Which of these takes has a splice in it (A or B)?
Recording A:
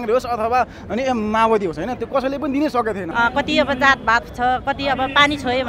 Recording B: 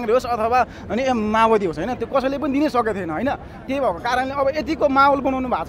A